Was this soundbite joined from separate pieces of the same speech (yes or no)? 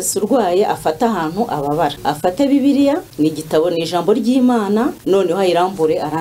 yes